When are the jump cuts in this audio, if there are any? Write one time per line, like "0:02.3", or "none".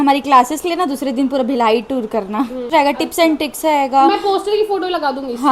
0:02.7